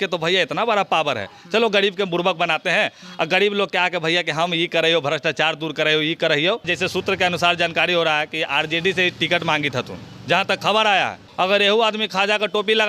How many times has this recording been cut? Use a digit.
2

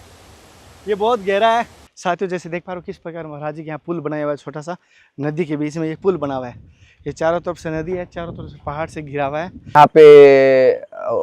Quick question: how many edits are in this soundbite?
2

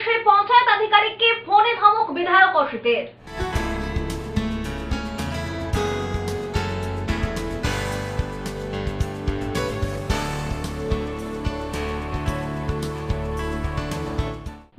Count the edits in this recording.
0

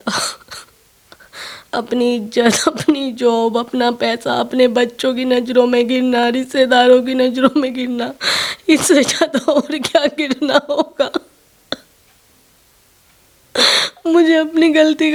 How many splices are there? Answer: 0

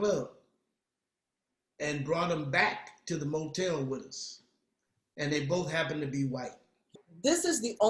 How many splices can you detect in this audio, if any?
1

